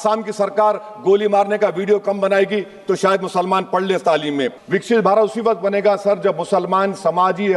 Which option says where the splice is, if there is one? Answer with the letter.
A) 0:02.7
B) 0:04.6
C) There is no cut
B